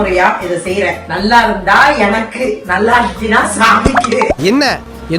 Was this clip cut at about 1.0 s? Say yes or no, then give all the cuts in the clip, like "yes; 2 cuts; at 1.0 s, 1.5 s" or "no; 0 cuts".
yes; 1 cut; at 1.0 s